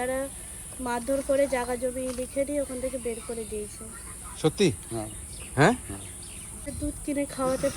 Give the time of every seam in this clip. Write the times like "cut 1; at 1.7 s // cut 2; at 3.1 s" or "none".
cut 1; at 6.7 s